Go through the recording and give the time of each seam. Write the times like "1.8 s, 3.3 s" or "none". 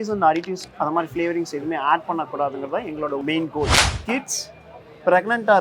3.7 s